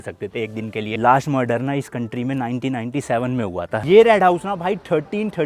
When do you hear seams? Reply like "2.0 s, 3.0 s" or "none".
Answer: 1.0 s, 3.8 s